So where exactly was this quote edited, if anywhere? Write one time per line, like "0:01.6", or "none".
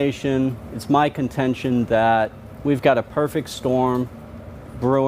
0:03.5